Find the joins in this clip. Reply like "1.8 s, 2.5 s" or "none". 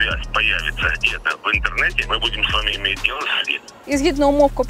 2.0 s, 3.8 s